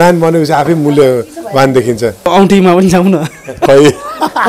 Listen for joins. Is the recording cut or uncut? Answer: cut